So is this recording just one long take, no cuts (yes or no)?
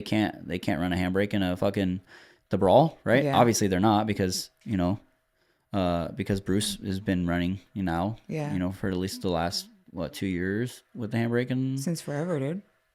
yes